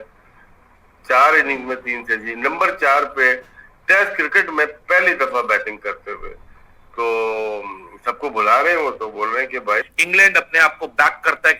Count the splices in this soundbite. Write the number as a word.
one